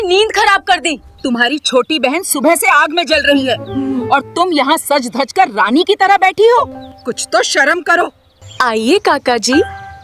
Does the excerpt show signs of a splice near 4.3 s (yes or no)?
no